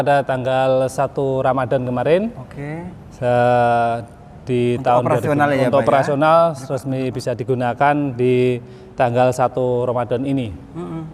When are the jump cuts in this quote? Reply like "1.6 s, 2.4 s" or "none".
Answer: none